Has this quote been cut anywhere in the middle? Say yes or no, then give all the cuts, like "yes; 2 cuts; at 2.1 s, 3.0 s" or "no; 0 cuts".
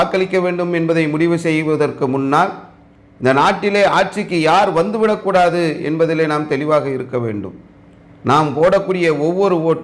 no; 0 cuts